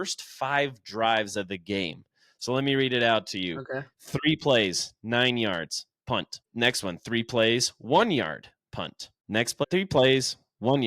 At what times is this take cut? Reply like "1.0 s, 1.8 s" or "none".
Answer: 6.4 s, 9.6 s